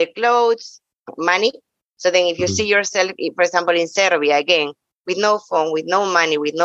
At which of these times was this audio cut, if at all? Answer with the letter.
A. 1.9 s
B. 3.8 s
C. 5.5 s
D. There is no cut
D